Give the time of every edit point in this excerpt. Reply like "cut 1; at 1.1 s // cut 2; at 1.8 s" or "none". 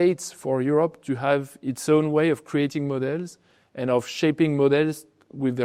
none